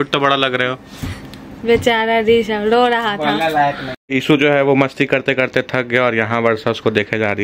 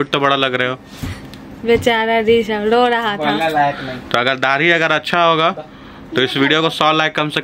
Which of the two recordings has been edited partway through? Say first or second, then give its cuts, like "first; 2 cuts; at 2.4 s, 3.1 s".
first; 1 cut; at 4.0 s